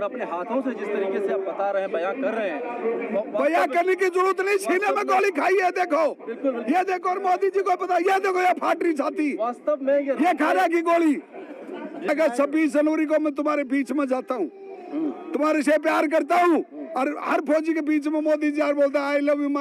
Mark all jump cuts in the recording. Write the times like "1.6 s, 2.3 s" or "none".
12.1 s